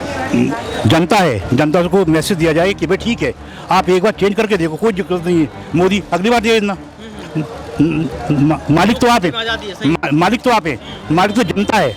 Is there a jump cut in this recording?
no; 0 cuts

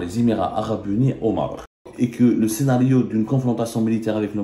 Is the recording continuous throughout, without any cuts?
no; 1 cut; at 1.9 s

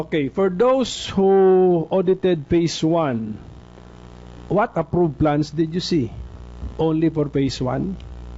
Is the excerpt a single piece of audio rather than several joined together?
no; 1 cut; at 1.8 s

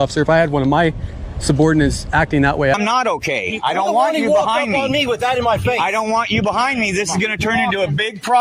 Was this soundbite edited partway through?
yes; 1 cut; at 2.7 s

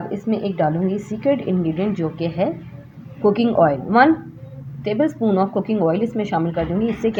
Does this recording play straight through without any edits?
yes; 0 cuts

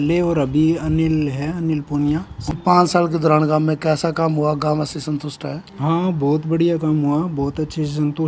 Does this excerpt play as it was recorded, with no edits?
yes; 0 cuts

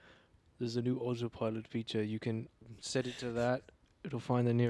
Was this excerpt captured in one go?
no; 1 cut; at 2.7 s

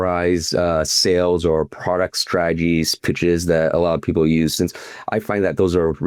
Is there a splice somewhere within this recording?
no; 0 cuts

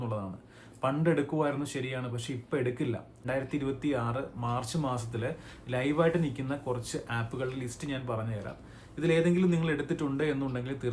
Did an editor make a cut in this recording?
yes; 1 cut; at 3.2 s

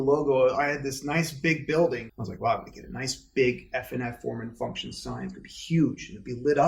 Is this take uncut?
no; 1 cut; at 2.1 s

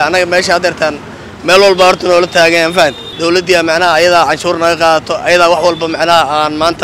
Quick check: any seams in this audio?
yes; 1 cut; at 3.1 s

